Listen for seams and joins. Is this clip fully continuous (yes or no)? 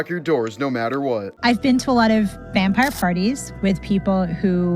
no